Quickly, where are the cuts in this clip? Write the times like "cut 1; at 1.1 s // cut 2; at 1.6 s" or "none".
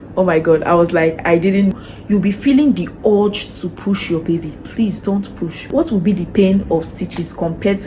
cut 1; at 1.8 s // cut 2; at 5.7 s